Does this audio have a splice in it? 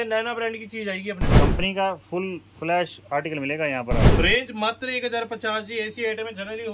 yes; 2 cuts; at 1.3 s, 4.1 s

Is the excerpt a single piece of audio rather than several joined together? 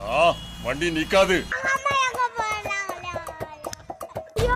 yes; 0 cuts

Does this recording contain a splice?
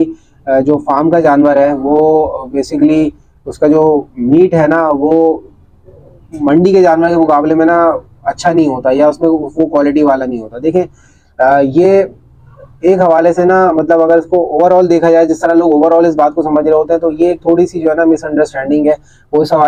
no; 0 cuts

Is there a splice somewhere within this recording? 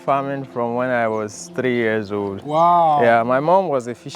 no; 0 cuts

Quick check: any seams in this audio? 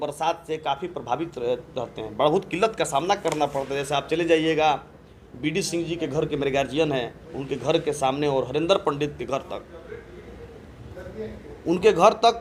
no; 0 cuts

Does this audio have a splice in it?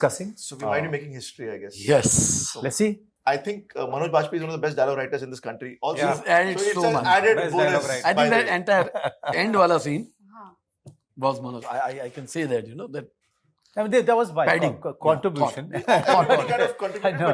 yes; 1 cut; at 3.1 s

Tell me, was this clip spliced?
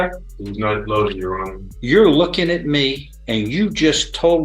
yes; 2 cuts; at 1.7 s, 3.1 s

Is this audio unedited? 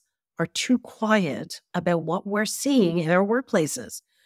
yes; 0 cuts

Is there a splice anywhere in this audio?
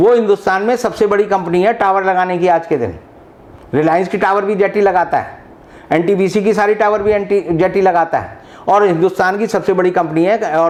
no; 0 cuts

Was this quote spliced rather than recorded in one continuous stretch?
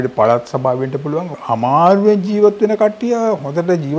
no; 0 cuts

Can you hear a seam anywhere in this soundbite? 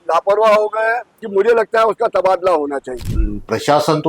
yes; 2 cuts; at 1.1 s, 2.9 s

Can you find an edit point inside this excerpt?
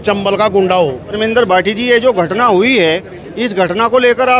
no; 0 cuts

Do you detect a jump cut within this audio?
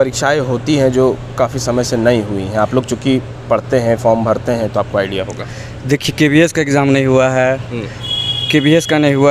no; 0 cuts

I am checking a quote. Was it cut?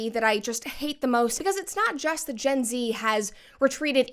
yes; 1 cut; at 1.4 s

